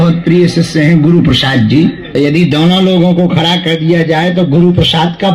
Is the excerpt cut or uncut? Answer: cut